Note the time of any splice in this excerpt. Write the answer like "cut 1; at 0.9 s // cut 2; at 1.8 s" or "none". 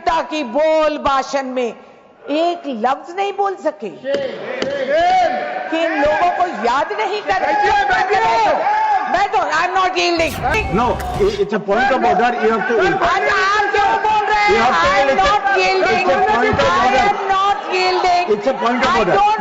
cut 1; at 10.5 s